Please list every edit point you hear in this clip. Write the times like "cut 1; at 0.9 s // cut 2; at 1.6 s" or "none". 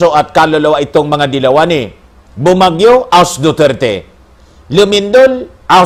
none

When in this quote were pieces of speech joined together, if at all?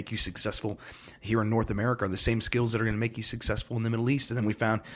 none

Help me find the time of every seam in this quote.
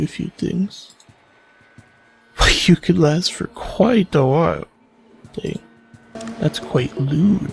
cut 1; at 6.2 s

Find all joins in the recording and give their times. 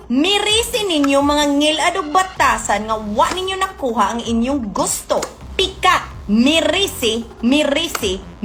none

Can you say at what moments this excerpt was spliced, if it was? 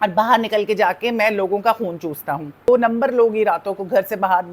cut 1; at 2.7 s

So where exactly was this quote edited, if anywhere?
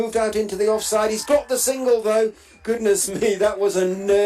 cut 1; at 2.2 s

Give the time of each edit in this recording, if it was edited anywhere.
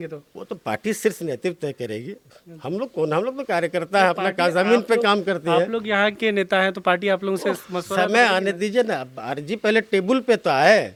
none

